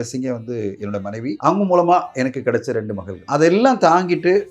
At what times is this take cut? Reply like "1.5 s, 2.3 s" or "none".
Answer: 1.4 s, 3.2 s

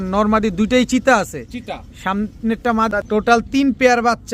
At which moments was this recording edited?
2.9 s

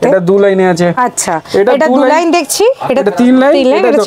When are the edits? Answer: 0.9 s

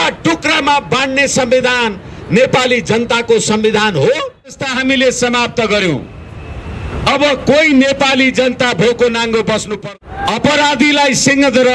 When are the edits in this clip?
4.7 s, 9.7 s

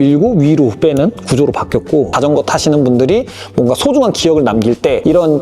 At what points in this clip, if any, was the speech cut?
2.1 s

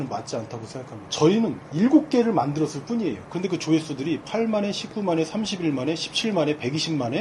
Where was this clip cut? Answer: 1.0 s

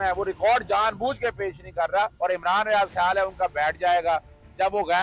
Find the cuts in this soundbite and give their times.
2.1 s

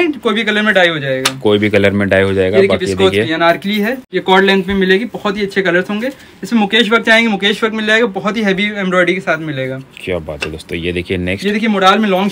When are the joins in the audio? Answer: 4.1 s

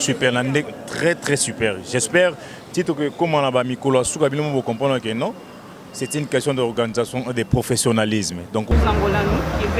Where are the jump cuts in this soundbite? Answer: 8.7 s

